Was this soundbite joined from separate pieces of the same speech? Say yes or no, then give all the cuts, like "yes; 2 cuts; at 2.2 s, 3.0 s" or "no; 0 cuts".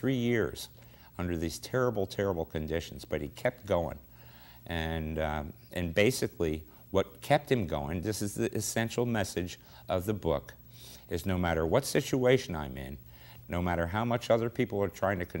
yes; 1 cut; at 12.2 s